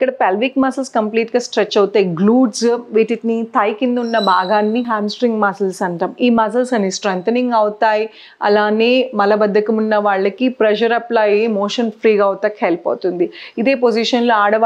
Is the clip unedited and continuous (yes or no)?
yes